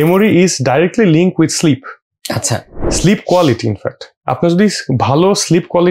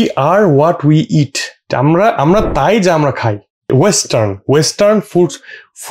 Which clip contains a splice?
second; 2 cuts; at 1.7 s, 3.7 s

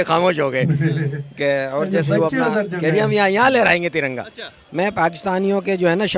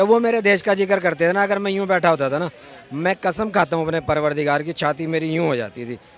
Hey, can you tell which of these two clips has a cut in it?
first; 1 cut; at 4.8 s

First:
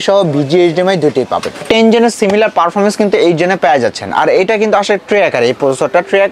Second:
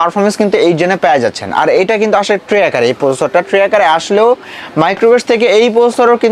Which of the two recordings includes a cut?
first; 1 cut; at 1.6 s

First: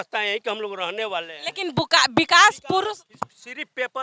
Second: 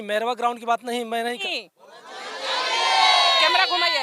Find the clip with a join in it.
second; 1 cut; at 1.4 s

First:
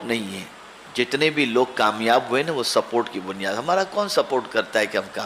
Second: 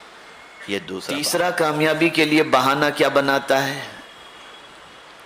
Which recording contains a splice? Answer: second; 1 cut; at 1.2 s

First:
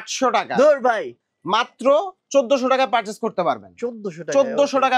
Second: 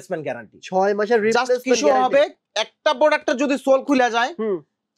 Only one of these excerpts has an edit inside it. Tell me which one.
first; 1 cut; at 1.1 s

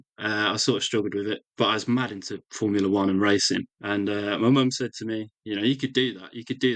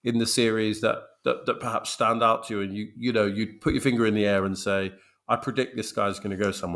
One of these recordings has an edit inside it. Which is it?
first; 2 cuts; at 1.5 s, 3.8 s

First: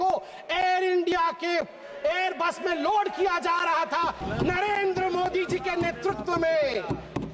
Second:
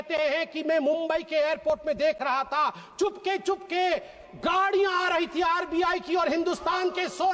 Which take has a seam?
first; 1 cut; at 4.2 s

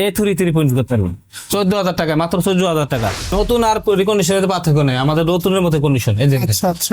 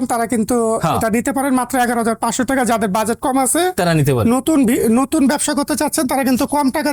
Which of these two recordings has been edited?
first; 1 cut; at 3.3 s

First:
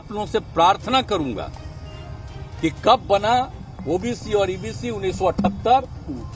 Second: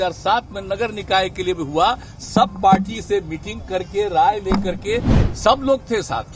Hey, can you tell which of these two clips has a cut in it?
second; 1 cut; at 5.1 s

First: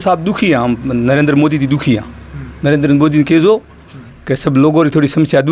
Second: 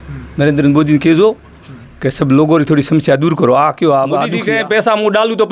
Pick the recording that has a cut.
second; 1 cut; at 4.4 s

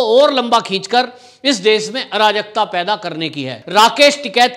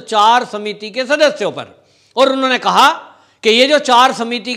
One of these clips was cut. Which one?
first; 1 cut; at 3.6 s

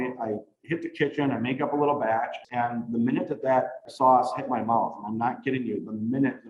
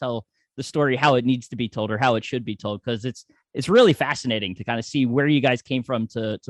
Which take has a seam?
first; 2 cuts; at 2.4 s, 3.8 s

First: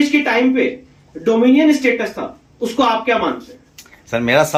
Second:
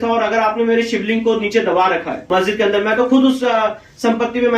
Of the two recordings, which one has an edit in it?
second; 1 cut; at 2.1 s

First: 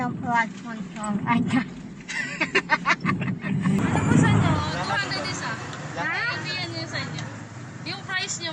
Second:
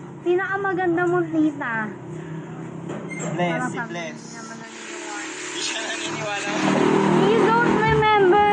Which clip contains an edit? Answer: first; 1 cut; at 3.8 s

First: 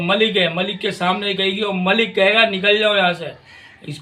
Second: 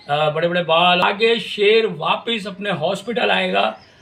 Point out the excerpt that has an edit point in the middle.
second; 1 cut; at 1.0 s

